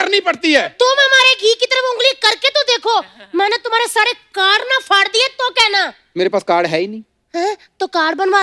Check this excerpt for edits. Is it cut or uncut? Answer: uncut